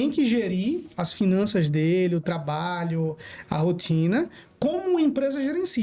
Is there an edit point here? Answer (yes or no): no